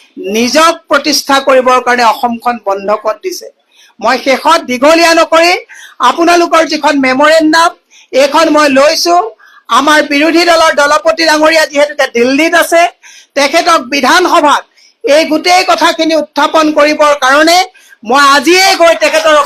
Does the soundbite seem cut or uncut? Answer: uncut